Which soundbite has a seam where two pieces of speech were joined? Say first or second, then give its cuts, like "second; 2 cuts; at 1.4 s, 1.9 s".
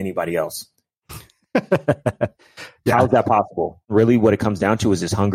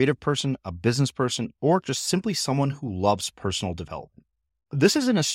first; 1 cut; at 3.9 s